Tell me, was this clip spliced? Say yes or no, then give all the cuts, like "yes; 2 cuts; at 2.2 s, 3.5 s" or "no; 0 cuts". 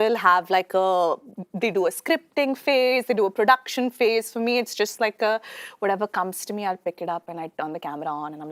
no; 0 cuts